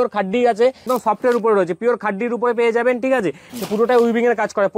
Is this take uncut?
no; 2 cuts; at 0.8 s, 3.4 s

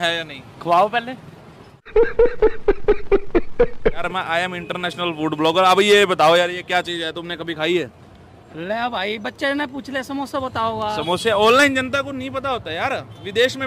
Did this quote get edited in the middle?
yes; 1 cut; at 4.0 s

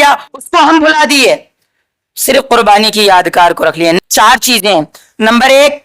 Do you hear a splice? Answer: yes; 1 cut; at 4.0 s

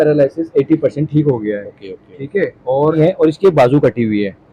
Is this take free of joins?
no; 1 cut; at 3.0 s

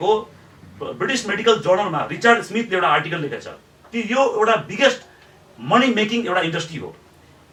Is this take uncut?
yes; 0 cuts

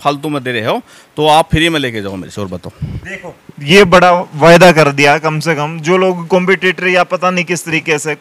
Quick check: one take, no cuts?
yes; 0 cuts

